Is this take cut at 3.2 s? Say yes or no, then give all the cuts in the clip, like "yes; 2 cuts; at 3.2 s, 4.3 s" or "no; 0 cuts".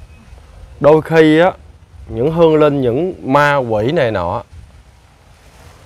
no; 0 cuts